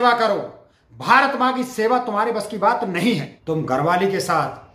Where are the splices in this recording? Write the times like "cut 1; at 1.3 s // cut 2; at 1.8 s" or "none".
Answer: cut 1; at 3.3 s